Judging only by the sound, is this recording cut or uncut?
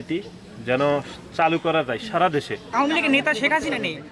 cut